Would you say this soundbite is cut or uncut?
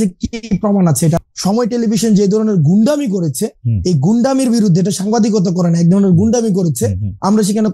cut